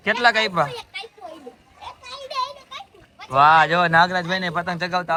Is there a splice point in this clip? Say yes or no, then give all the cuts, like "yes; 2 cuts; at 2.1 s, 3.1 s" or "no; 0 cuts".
no; 0 cuts